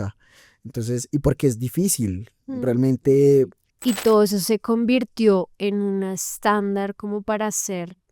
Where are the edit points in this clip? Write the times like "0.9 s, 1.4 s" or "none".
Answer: 3.6 s